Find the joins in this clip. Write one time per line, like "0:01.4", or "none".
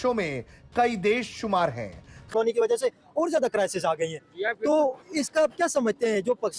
0:02.3